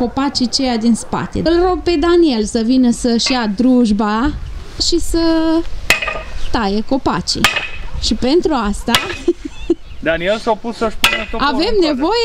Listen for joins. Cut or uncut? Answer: cut